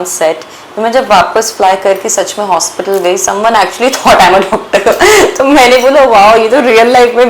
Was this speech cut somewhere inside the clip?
no; 0 cuts

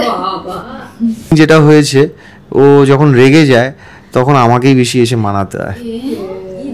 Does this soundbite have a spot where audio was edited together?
yes; 1 cut; at 1.3 s

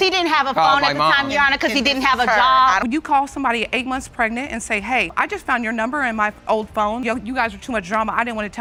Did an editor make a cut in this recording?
no; 0 cuts

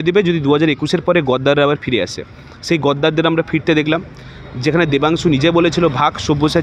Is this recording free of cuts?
yes; 0 cuts

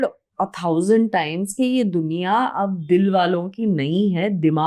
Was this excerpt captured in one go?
yes; 0 cuts

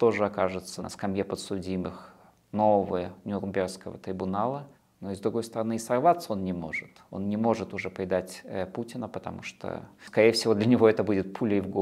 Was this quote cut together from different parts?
yes; 2 cuts; at 0.8 s, 10.0 s

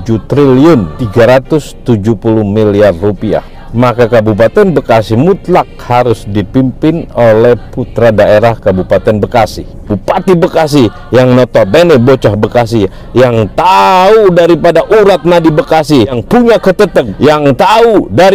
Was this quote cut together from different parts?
yes; 5 cuts; at 1.0 s, 3.6 s, 9.9 s, 16.2 s, 17.1 s

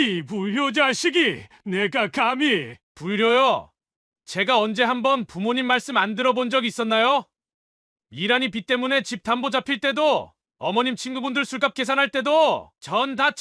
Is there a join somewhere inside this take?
no; 0 cuts

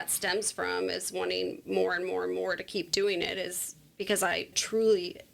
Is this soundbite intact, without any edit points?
yes; 0 cuts

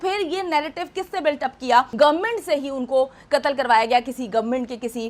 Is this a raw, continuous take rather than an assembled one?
no; 1 cut; at 1.9 s

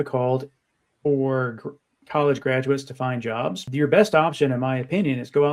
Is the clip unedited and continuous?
no; 1 cut; at 3.6 s

